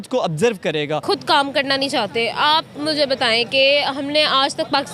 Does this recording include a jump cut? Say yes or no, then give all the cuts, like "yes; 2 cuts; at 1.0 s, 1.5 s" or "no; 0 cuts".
yes; 1 cut; at 1.0 s